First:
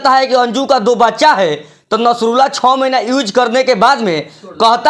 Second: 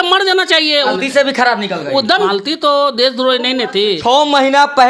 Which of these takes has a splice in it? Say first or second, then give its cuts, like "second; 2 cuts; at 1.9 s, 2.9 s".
second; 3 cuts; at 0.9 s, 2.3 s, 4.0 s